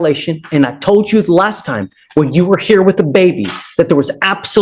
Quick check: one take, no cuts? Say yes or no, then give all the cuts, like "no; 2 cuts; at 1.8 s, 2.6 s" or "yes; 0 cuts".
yes; 0 cuts